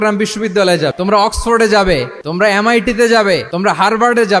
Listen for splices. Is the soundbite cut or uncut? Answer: cut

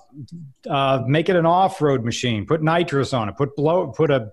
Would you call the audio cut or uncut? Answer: uncut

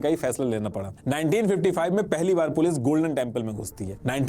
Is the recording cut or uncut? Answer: cut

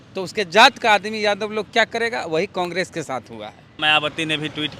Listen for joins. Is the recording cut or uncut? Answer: cut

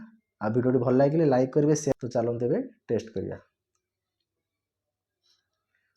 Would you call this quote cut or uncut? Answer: cut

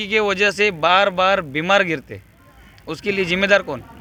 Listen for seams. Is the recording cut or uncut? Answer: uncut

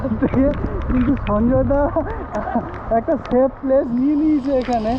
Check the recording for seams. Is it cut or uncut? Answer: uncut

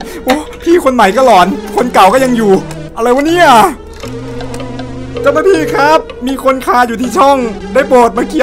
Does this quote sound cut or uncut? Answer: uncut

